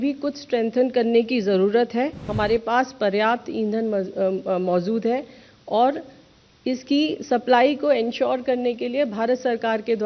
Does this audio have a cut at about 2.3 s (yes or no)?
yes